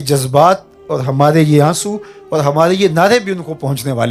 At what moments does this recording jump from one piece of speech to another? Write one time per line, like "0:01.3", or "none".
none